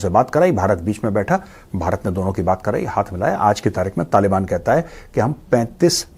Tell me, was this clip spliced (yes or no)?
no